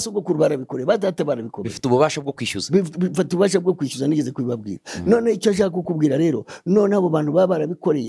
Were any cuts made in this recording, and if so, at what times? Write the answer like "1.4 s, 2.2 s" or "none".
none